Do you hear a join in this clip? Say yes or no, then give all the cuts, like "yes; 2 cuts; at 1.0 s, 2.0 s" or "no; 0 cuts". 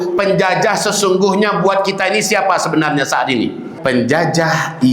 yes; 1 cut; at 3.7 s